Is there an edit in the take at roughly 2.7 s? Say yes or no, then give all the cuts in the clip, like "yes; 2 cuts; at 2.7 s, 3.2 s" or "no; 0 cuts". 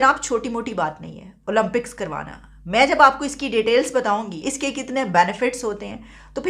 no; 1 cut; at 4.4 s